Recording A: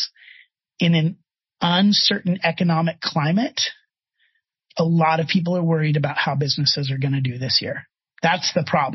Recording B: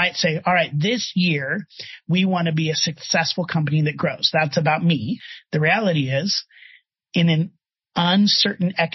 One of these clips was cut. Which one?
B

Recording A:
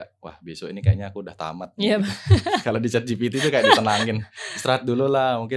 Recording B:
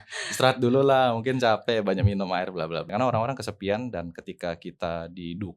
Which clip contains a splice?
B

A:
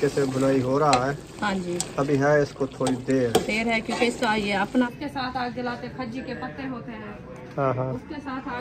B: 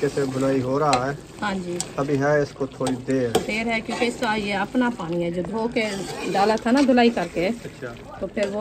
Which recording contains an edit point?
A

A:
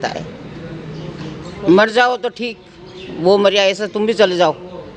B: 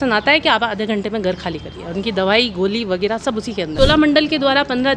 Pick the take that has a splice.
B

